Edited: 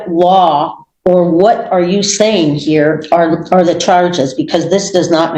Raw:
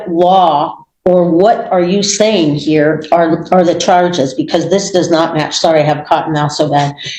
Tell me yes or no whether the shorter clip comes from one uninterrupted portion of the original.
yes